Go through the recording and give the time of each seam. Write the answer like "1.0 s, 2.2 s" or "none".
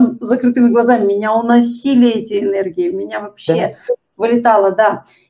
none